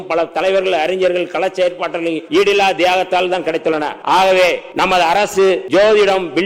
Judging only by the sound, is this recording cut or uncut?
cut